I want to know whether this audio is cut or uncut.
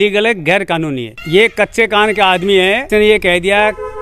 cut